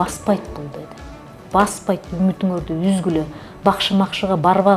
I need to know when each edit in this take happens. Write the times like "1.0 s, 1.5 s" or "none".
none